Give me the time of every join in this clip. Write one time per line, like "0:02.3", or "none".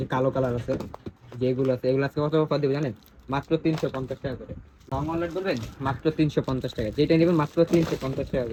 none